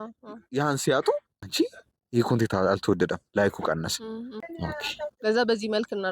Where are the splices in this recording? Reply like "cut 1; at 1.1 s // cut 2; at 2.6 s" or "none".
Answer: cut 1; at 1.4 s // cut 2; at 4.4 s